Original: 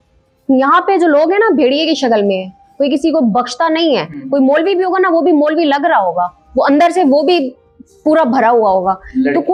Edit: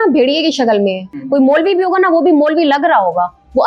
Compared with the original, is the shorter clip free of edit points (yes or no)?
no